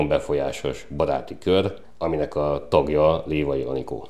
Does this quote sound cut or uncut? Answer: cut